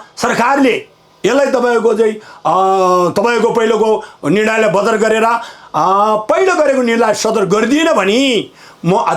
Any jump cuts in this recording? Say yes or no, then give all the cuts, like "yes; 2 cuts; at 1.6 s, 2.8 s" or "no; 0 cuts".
no; 0 cuts